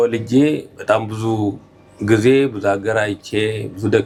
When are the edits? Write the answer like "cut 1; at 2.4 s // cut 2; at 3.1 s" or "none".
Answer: none